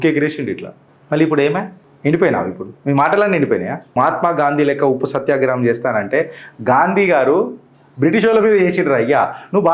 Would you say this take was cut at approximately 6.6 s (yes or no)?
no